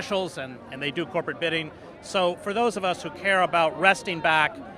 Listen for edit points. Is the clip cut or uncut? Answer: cut